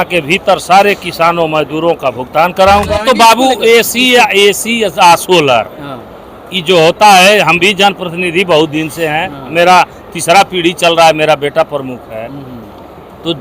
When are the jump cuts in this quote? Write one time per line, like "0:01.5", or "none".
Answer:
0:02.9